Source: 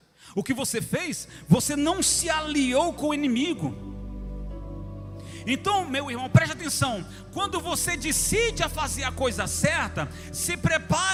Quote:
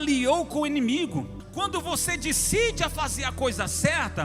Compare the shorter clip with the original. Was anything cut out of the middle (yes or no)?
yes